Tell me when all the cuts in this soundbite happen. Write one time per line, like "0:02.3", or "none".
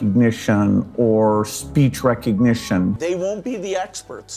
0:03.0